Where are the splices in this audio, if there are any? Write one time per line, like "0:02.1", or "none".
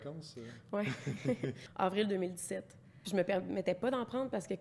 0:01.6
0:03.0